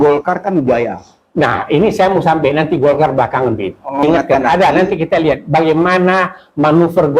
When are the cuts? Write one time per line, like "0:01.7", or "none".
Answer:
0:04.0

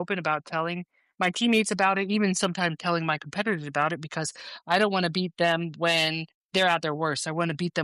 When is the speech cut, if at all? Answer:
none

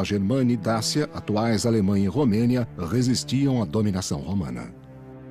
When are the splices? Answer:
0:02.9

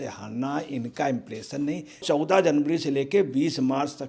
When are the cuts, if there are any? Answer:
0:02.0

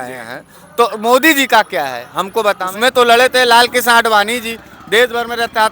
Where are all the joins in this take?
0:02.7

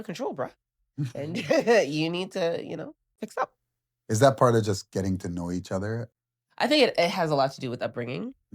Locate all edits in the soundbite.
0:03.0
0:06.1

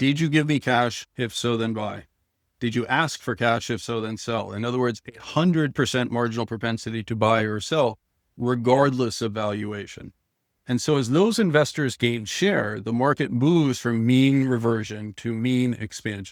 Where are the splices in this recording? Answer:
none

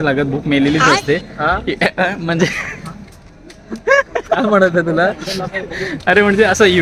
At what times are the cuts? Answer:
0:01.4

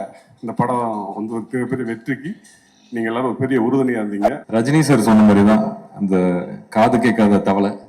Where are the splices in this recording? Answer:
0:04.4

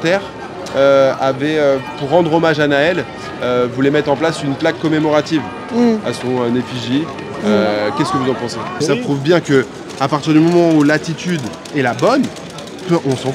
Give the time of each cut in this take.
0:08.8

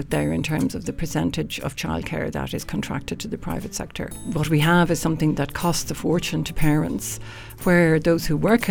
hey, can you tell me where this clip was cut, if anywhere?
0:04.1

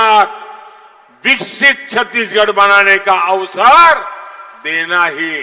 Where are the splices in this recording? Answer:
none

